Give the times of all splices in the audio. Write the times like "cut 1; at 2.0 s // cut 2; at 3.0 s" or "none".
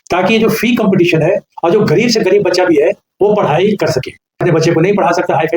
cut 1; at 4.4 s